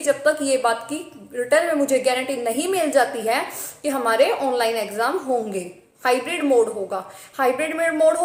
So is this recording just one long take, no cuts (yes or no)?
yes